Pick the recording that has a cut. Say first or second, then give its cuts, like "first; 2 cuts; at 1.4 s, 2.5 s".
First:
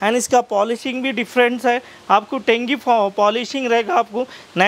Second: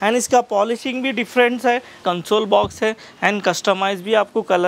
second; 1 cut; at 2.0 s